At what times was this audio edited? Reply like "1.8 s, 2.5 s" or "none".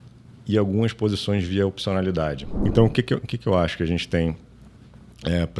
2.5 s